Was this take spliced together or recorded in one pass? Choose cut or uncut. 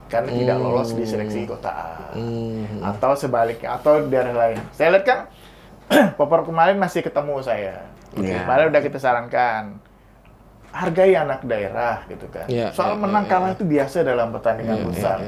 uncut